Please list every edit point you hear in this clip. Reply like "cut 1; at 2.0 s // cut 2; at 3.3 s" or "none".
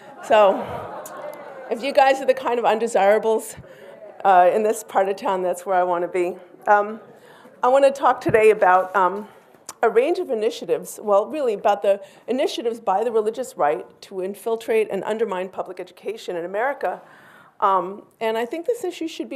cut 1; at 12.4 s